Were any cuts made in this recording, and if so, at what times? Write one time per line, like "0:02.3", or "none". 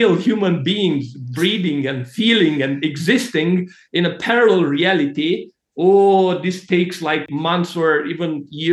0:07.3